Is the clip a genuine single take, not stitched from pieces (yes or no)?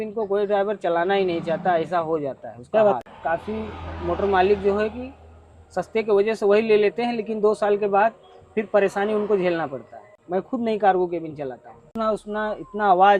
yes